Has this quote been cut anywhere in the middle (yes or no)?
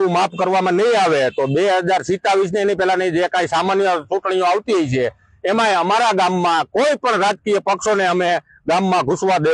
no